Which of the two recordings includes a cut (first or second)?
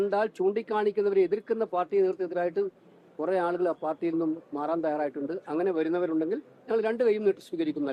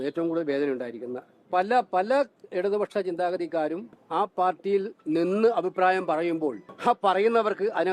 second